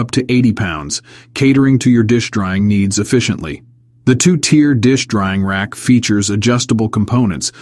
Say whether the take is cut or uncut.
cut